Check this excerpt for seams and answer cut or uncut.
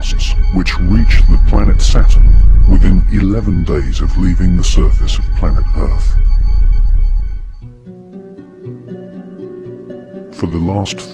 cut